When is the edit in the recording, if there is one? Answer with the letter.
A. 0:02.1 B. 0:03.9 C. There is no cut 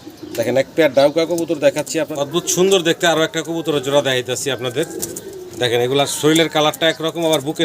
A